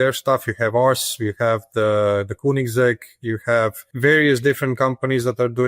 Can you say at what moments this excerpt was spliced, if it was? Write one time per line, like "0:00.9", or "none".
0:03.8

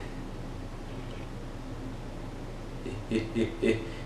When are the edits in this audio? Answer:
none

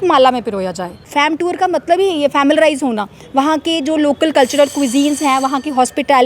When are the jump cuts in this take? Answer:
0:01.1

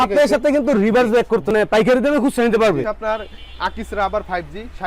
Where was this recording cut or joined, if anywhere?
0:01.5

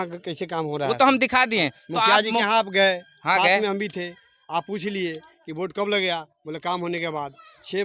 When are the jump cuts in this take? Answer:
none

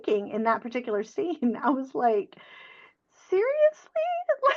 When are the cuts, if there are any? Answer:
none

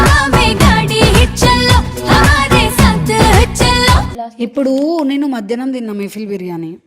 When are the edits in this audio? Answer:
0:04.2

